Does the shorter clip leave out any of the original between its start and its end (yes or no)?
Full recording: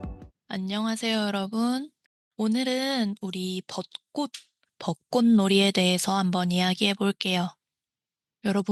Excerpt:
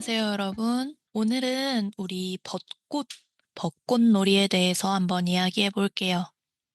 yes